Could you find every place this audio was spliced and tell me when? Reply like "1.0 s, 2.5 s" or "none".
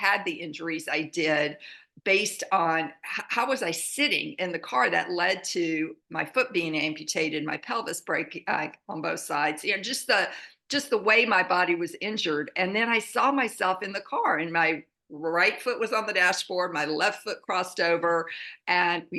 none